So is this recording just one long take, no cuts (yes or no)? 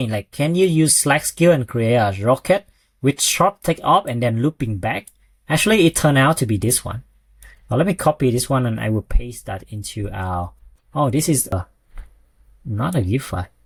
yes